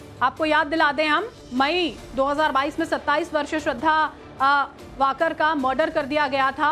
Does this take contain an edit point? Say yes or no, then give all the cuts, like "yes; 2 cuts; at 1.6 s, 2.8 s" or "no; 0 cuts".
yes; 1 cut; at 2.3 s